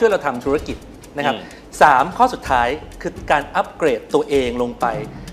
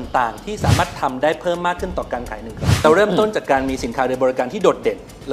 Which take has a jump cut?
second; 1 cut; at 2.8 s

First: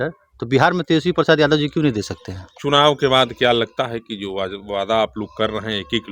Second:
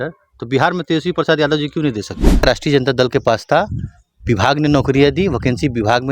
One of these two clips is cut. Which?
second; 1 cut; at 2.4 s

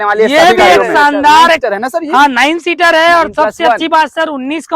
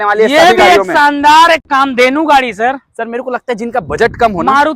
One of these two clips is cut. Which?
first; 1 cut; at 1.6 s

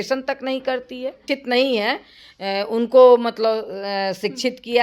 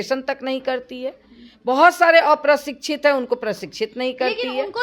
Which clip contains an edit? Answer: first; 1 cut; at 1.2 s

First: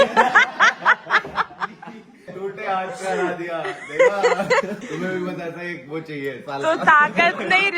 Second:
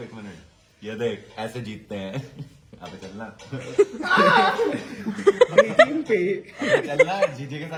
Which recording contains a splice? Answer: first; 2 cuts; at 2.2 s, 4.8 s

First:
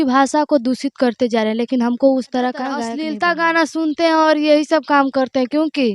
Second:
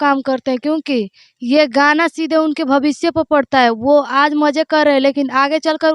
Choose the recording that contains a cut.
first; 1 cut; at 2.9 s

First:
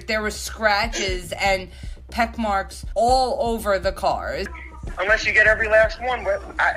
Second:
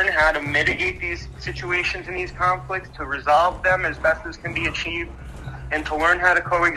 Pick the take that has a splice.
first; 1 cut; at 4.5 s

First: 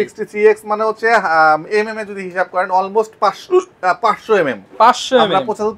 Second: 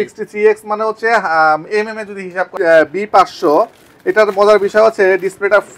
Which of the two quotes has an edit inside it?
second; 1 cut; at 2.4 s

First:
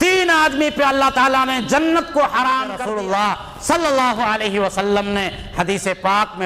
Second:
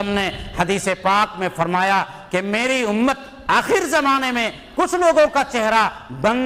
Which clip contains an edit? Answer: first; 1 cut; at 2.8 s

